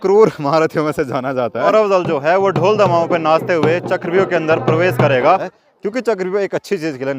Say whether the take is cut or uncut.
cut